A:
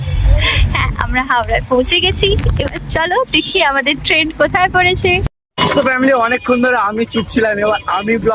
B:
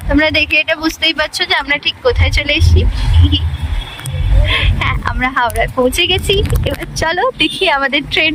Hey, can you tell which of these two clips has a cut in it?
A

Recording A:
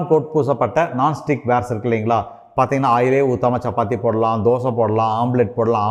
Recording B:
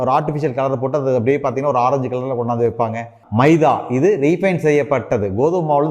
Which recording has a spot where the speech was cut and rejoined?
B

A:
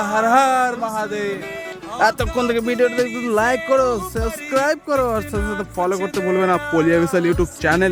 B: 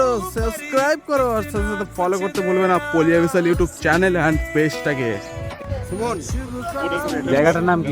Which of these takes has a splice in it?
B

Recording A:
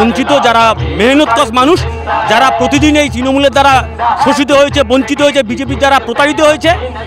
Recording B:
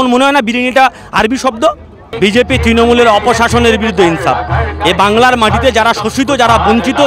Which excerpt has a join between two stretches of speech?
B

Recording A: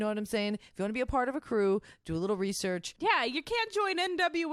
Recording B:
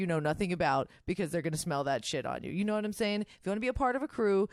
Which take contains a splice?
A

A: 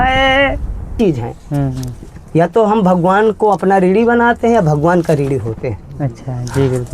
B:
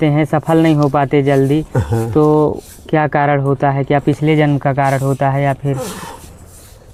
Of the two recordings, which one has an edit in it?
A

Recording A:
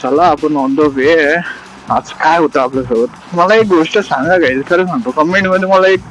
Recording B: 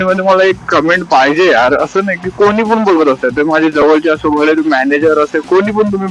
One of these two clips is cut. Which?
A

